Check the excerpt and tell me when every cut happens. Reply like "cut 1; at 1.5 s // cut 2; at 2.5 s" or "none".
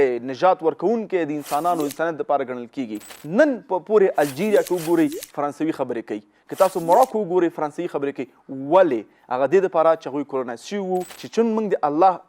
cut 1; at 3.1 s // cut 2; at 11.2 s

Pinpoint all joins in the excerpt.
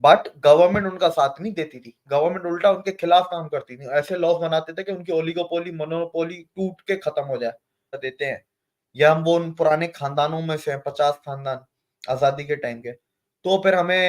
cut 1; at 8.0 s

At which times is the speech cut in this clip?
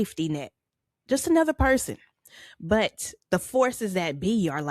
cut 1; at 3.1 s

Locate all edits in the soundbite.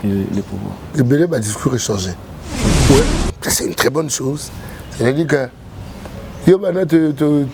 cut 1; at 2.6 s

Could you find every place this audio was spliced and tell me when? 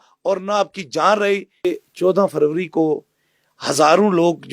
cut 1; at 1.7 s

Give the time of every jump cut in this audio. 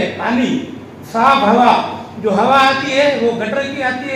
none

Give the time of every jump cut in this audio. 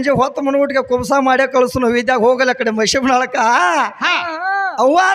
none

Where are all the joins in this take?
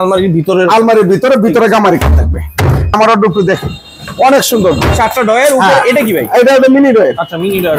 cut 1; at 2.9 s

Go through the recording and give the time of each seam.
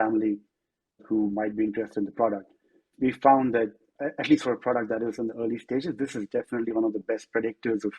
cut 1; at 1.0 s // cut 2; at 2.9 s // cut 3; at 3.9 s

